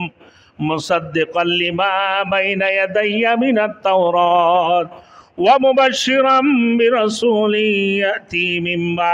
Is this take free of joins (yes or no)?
yes